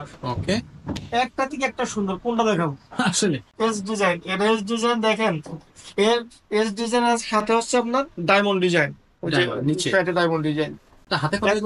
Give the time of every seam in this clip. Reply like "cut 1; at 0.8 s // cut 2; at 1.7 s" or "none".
cut 1; at 3.5 s